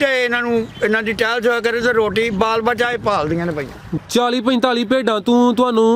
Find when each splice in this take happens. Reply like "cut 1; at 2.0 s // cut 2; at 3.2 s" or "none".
cut 1; at 4.0 s